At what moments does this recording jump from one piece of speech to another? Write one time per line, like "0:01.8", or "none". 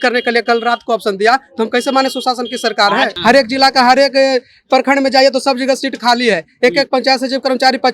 0:03.1

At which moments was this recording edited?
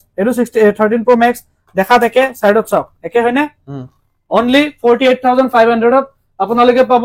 none

